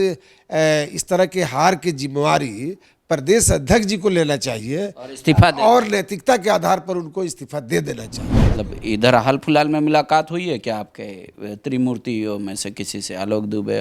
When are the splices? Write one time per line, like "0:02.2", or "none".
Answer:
0:08.4